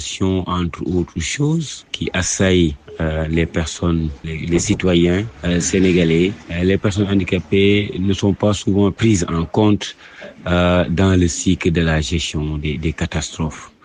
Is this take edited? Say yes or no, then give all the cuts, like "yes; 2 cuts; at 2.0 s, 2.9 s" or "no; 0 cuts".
no; 0 cuts